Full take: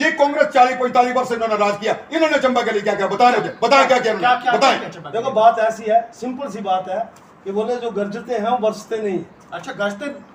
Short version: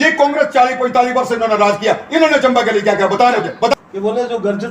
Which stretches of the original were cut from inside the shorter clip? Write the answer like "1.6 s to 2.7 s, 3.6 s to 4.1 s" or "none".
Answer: 3.7 s to 7.3 s